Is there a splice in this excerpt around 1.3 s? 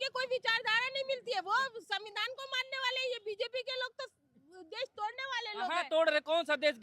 no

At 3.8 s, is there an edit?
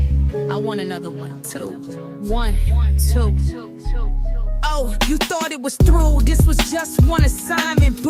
yes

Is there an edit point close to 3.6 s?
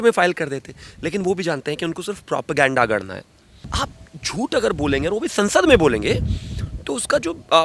yes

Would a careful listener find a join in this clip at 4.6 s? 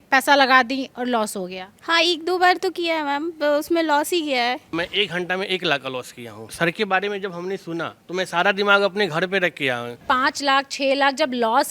yes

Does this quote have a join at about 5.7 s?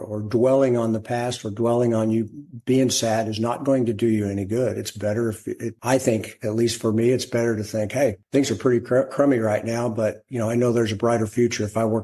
yes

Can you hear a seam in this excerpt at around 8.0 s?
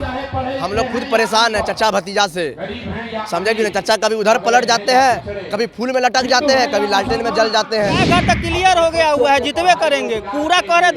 yes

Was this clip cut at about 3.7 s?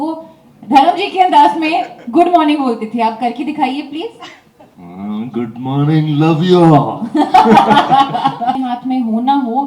no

